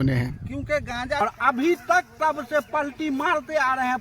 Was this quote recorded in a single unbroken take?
no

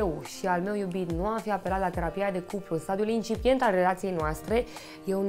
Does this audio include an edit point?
no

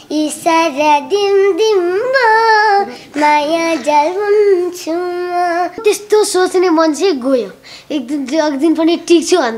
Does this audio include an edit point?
yes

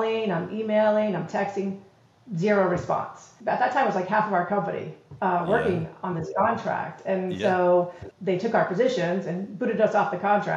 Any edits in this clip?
yes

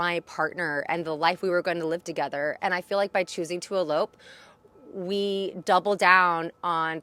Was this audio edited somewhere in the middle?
no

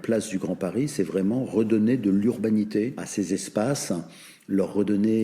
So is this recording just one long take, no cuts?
no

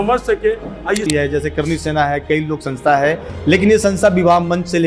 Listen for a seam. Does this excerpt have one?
yes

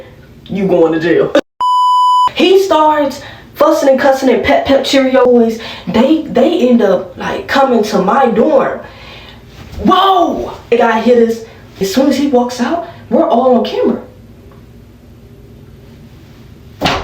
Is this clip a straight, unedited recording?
no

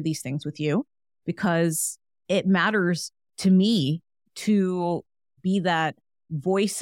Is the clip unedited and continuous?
yes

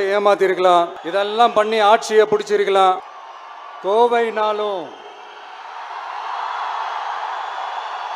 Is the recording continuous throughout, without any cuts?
no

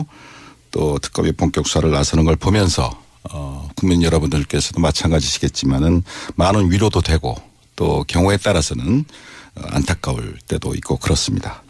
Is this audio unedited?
no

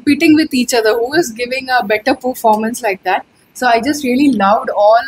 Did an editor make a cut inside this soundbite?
no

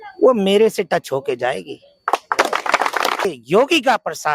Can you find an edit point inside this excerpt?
yes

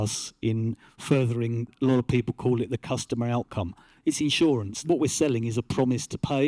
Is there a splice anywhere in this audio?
yes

